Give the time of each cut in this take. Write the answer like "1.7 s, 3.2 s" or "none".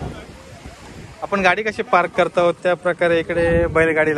none